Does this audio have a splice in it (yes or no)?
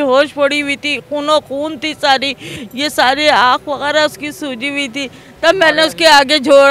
no